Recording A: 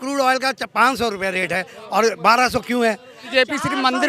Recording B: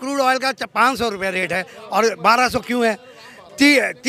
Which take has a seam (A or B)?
A